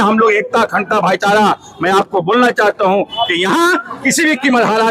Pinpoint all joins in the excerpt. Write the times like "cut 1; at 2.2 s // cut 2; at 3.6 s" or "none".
none